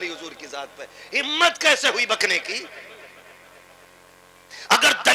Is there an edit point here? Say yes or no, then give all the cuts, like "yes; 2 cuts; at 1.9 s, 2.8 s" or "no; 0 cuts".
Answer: no; 0 cuts